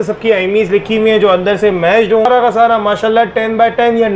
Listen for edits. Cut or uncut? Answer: cut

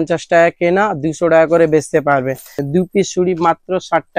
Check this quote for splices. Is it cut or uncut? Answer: cut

